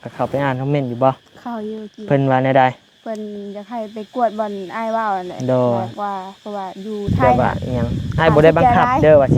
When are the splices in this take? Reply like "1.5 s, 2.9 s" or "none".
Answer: 7.2 s